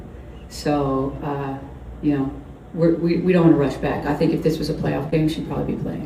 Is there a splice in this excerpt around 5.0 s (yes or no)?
yes